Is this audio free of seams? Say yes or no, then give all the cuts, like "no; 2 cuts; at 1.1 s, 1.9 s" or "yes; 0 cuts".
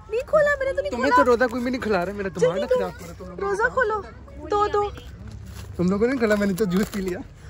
yes; 0 cuts